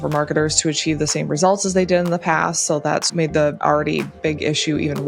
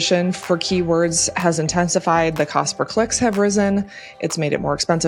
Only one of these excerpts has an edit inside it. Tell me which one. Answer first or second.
first